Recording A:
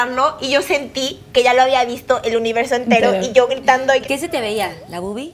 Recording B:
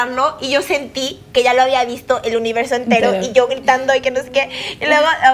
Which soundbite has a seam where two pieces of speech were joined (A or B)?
A